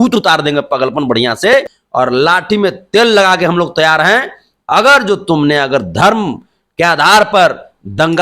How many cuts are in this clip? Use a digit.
1